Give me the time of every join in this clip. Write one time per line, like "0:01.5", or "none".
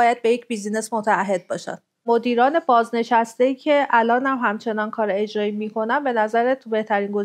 0:02.0